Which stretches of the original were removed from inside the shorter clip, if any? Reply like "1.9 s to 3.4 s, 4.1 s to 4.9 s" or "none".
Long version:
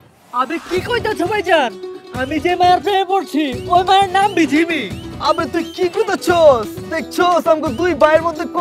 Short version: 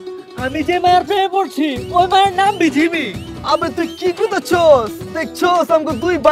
none